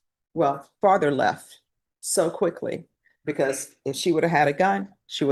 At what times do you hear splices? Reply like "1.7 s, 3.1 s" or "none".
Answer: none